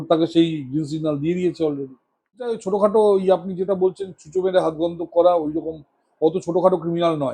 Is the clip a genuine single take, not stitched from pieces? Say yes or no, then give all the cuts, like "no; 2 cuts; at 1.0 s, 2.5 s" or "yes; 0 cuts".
no; 1 cut; at 2.6 s